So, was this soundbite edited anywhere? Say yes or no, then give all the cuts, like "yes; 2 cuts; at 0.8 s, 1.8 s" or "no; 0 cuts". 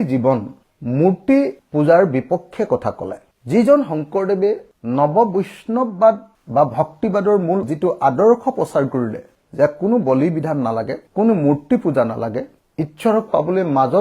no; 0 cuts